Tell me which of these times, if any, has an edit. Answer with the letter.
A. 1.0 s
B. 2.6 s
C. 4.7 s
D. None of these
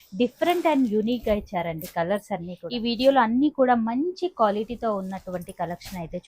B